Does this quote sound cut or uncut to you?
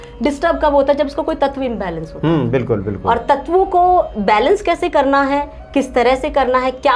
uncut